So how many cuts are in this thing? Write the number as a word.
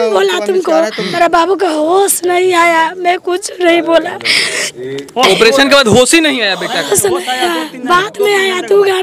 one